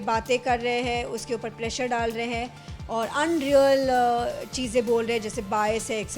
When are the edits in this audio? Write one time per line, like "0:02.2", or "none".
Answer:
none